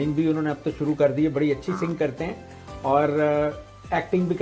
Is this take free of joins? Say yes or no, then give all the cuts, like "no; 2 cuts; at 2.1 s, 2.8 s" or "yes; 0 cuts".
yes; 0 cuts